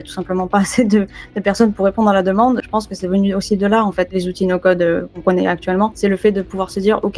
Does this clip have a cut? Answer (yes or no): yes